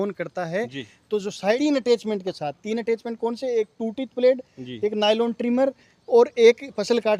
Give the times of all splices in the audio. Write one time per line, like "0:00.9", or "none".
0:01.6